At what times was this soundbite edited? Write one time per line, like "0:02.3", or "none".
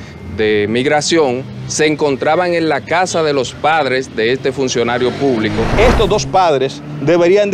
0:05.7